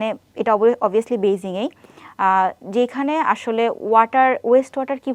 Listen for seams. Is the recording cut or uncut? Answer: uncut